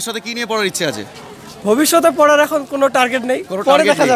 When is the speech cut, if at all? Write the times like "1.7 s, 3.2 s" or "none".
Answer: none